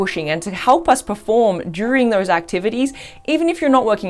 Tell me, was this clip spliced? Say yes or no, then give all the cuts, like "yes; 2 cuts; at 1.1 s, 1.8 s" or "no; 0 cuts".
no; 0 cuts